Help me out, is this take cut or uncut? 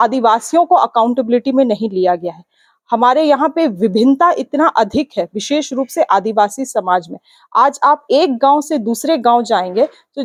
uncut